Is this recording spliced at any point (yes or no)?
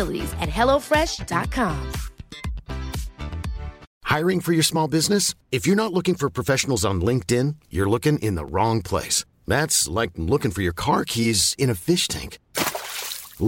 yes